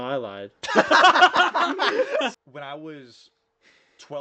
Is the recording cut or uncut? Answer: cut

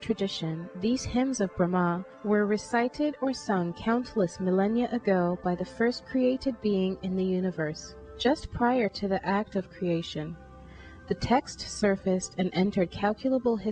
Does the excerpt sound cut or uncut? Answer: uncut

